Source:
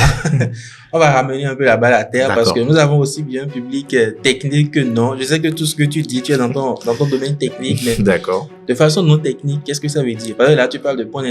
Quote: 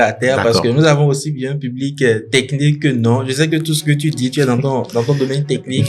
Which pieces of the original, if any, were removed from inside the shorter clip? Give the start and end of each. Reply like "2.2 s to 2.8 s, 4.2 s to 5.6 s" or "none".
none